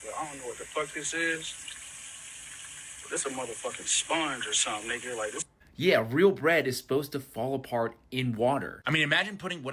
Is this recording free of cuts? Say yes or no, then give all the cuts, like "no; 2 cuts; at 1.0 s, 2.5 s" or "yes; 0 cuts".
yes; 0 cuts